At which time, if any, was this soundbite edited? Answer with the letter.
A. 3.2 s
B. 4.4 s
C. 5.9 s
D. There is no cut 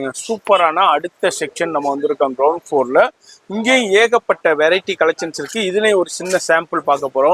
D